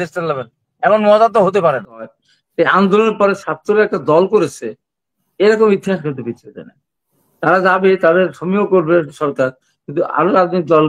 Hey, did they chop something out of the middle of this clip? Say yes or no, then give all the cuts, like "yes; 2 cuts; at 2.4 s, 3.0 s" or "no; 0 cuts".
yes; 1 cut; at 2.0 s